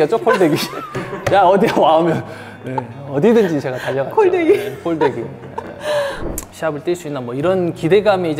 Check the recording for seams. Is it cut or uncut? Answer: cut